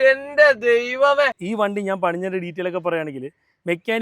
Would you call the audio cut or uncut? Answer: cut